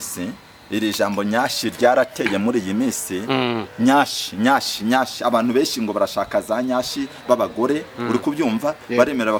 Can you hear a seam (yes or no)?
no